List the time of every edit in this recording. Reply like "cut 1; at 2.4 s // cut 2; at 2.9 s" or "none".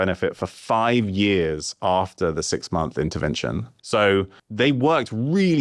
cut 1; at 3.7 s // cut 2; at 4.4 s